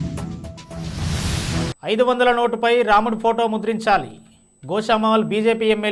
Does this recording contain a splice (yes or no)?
yes